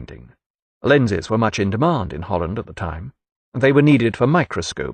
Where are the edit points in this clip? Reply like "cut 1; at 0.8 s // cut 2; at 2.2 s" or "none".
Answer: none

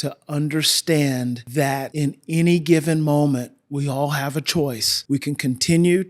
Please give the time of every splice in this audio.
cut 1; at 1.8 s // cut 2; at 4.9 s

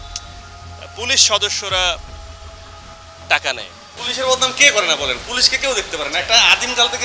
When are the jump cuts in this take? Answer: cut 1; at 3.8 s

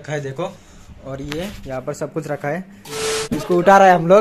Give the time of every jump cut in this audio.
cut 1; at 3.0 s

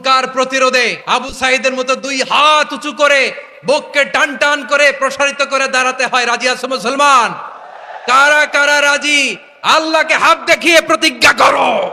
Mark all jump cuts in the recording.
cut 1; at 1.0 s

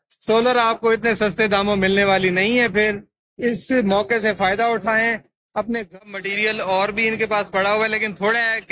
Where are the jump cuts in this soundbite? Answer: cut 1; at 5.8 s

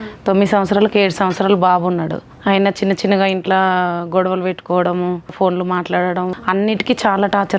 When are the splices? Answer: cut 1; at 2.2 s // cut 2; at 5.3 s // cut 3; at 6.4 s

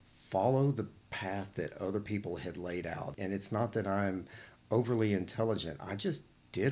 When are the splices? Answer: cut 1; at 3.1 s

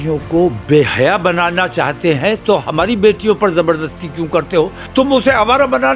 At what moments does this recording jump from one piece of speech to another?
cut 1; at 4.8 s

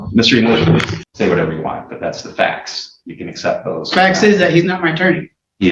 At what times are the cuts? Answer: cut 1; at 1.0 s

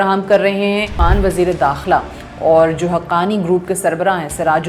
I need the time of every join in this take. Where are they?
cut 1; at 1.0 s

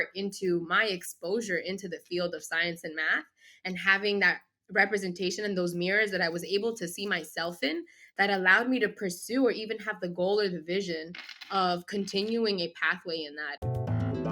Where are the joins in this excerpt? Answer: cut 1; at 13.4 s

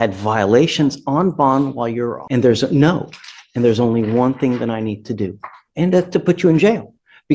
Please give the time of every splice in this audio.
cut 1; at 2.2 s

